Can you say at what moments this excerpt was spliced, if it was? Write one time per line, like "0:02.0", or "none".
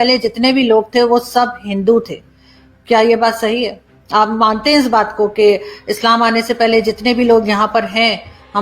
none